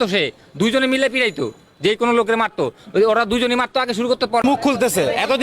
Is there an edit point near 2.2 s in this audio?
no; 1 cut; at 4.4 s

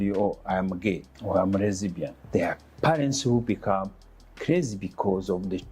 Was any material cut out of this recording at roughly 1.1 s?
yes; 2 cuts; at 1.1 s, 2.2 s

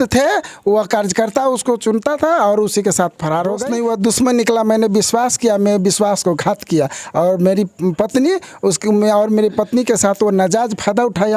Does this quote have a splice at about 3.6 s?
yes; 1 cut; at 3.6 s

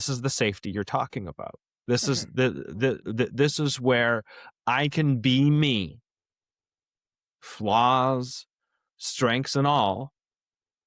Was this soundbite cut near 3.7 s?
no; 0 cuts

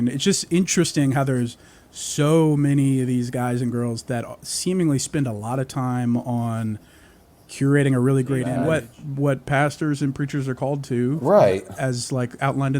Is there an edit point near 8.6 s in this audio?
yes; 1 cut; at 8.6 s

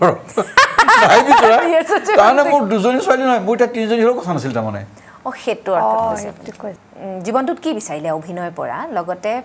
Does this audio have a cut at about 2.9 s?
no; 1 cut; at 6.6 s

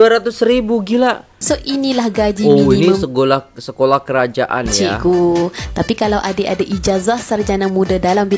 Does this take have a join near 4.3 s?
no; 1 cut; at 1.3 s

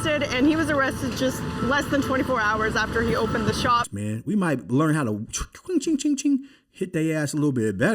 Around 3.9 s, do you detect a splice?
yes; 1 cut; at 3.9 s

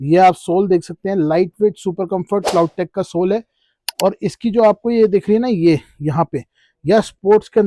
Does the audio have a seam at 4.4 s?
no; 0 cuts

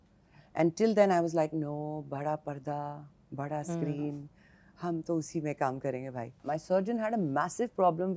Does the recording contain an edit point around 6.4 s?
yes; 1 cut; at 6.4 s

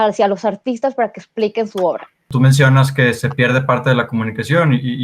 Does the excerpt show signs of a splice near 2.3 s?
yes; 1 cut; at 2.3 s

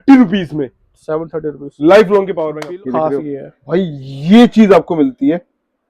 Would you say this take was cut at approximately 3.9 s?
no; 1 cut; at 2.5 s

